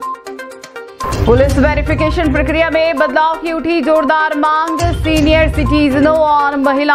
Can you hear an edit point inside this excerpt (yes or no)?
yes